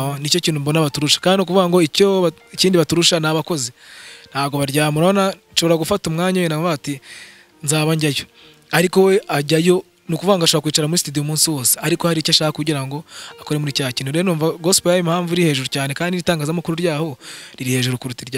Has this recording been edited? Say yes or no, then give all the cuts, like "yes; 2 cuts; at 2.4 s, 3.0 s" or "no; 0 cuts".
no; 0 cuts